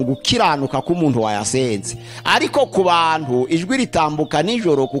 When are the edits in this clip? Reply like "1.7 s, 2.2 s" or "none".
none